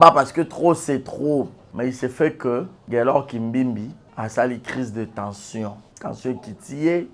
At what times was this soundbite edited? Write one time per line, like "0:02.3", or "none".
0:01.6
0:02.8
0:04.0
0:05.9